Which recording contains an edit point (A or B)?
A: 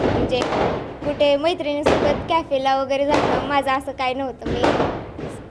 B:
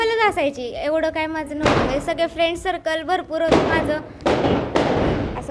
B